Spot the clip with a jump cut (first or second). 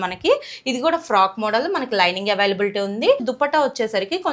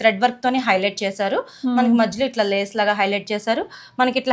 first